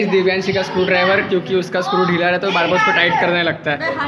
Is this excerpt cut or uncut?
uncut